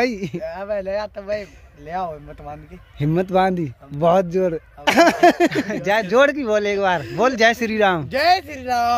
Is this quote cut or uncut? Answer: cut